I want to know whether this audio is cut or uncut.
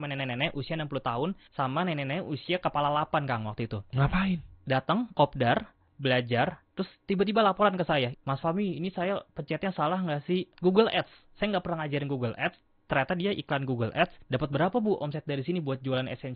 cut